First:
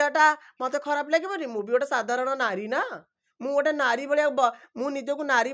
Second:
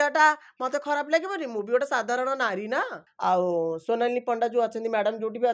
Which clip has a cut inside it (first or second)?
second